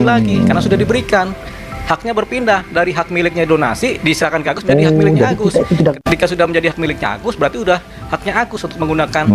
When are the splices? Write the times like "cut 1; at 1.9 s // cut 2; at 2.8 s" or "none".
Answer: cut 1; at 6.0 s